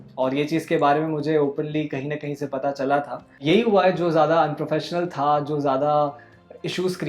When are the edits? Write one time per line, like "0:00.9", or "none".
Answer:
0:03.3